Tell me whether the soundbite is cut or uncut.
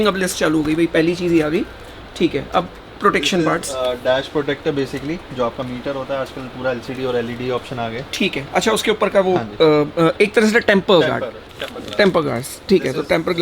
uncut